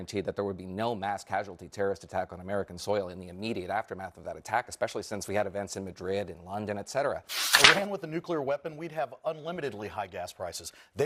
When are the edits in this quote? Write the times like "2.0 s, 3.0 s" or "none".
7.4 s

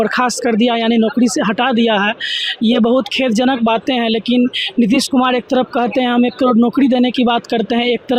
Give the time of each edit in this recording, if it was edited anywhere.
none

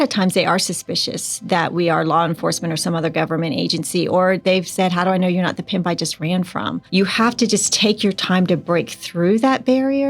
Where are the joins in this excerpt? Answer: 6.8 s

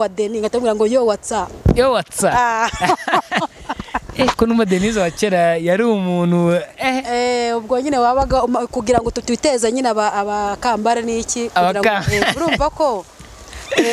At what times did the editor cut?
none

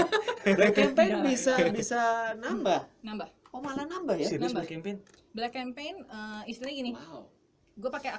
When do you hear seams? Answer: none

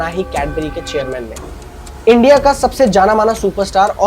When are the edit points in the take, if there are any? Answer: 1.4 s

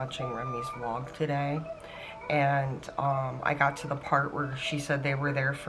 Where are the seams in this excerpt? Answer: none

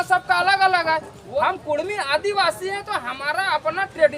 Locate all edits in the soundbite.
1.2 s

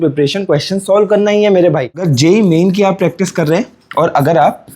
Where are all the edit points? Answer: 2.1 s

